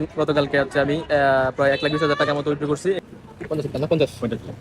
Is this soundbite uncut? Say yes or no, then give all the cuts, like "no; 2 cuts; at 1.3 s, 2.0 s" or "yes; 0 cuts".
no; 1 cut; at 3.0 s